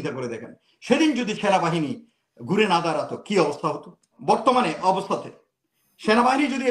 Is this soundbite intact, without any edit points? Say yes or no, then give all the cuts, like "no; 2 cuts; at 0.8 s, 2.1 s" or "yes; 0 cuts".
no; 1 cut; at 4.1 s